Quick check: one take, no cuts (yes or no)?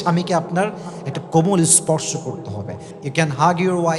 no